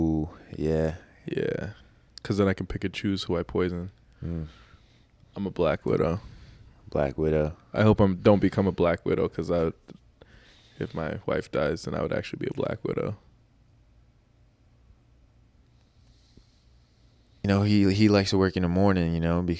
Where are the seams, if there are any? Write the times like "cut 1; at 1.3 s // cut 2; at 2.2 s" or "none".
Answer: cut 1; at 17.5 s